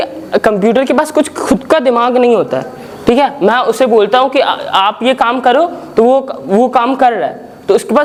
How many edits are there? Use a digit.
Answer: 0